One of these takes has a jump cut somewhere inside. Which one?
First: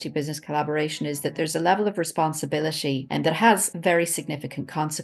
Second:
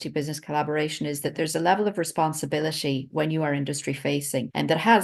first; 1 cut; at 3.1 s

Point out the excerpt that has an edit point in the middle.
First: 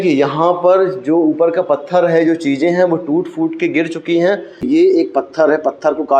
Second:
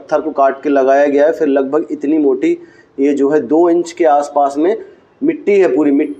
first; 1 cut; at 4.6 s

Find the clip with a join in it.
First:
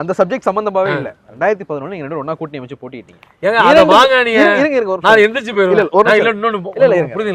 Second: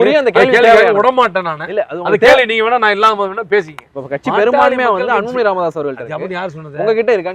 second; 1 cut; at 3.8 s

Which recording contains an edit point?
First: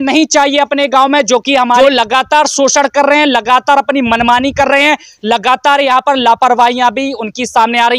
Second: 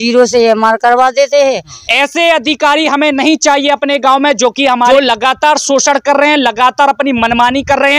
second; 1 cut; at 1.8 s

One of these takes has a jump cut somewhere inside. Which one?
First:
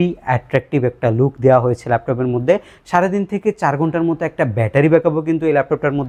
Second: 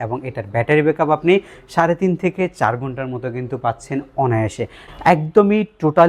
second; 1 cut; at 4.8 s

